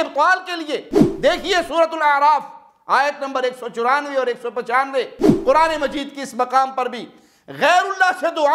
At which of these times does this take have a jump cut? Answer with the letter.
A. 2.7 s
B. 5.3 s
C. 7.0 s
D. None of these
B